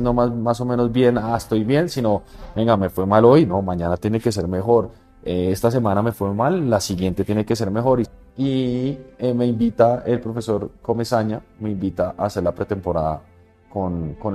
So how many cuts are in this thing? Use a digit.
1